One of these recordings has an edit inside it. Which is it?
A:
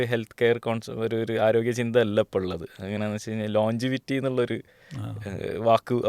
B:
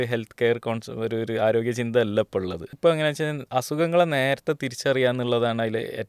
B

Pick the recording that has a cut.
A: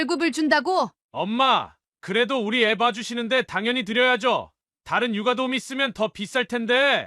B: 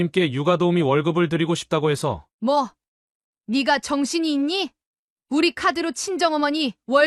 A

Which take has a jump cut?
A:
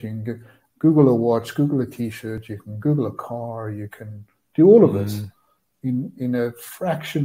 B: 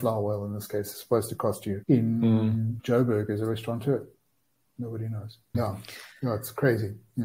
B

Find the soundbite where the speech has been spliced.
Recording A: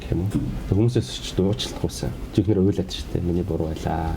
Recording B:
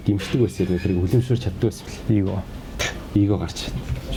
A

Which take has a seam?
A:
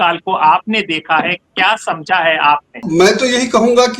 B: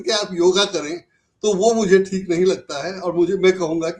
A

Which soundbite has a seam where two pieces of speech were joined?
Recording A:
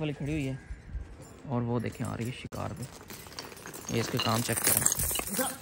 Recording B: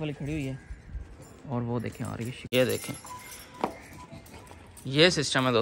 B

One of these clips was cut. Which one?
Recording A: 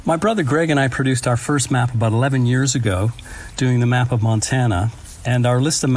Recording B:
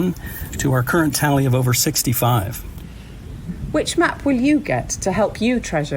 B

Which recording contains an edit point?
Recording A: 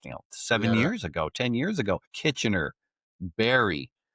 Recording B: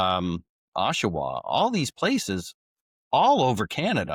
A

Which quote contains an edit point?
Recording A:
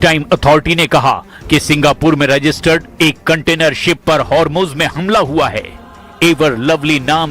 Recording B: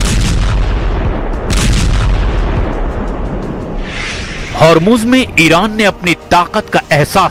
A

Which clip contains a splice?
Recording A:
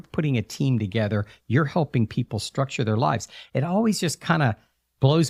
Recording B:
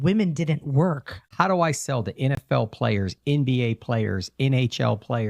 B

